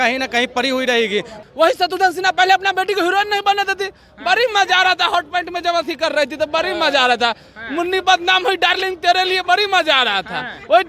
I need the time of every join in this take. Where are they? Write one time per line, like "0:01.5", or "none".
0:01.4